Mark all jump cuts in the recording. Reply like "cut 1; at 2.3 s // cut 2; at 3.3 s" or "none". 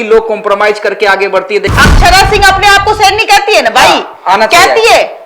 cut 1; at 1.7 s